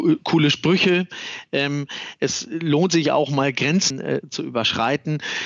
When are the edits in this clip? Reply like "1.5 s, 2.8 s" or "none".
3.9 s